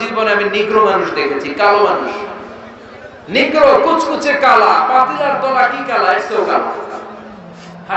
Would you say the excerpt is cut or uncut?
uncut